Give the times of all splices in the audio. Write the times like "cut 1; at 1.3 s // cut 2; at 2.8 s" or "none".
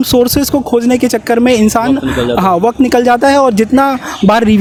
none